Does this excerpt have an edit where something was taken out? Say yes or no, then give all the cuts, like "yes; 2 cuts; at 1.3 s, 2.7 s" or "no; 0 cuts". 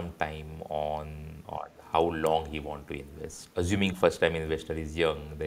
yes; 2 cuts; at 1.3 s, 3.4 s